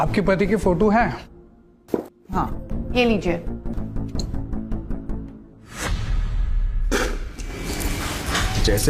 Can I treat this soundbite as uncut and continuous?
no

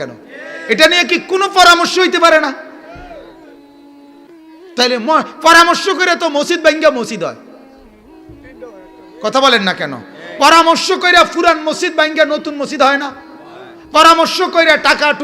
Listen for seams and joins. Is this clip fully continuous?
no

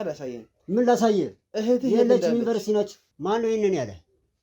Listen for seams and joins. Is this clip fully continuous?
no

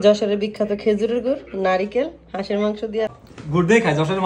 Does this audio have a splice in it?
yes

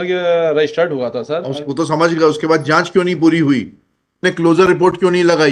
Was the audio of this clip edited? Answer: yes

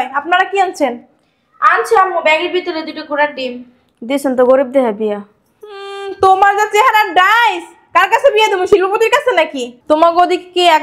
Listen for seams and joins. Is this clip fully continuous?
yes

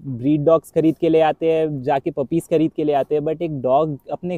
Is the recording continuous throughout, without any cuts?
yes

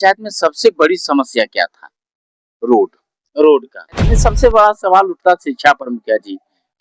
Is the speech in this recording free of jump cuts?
no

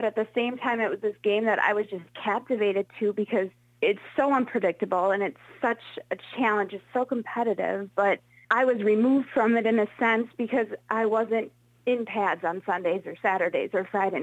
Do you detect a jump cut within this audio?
yes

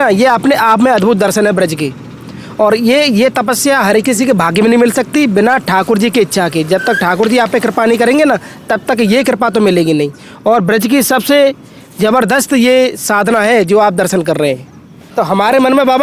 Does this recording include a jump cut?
no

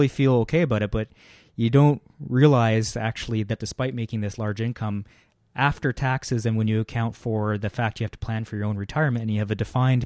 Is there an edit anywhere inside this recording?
no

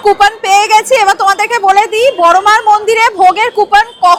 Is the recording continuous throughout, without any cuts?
yes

